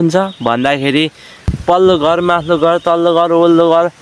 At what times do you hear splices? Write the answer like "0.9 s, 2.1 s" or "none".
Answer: 1.4 s